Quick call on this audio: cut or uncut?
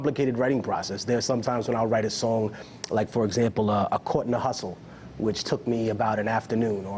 cut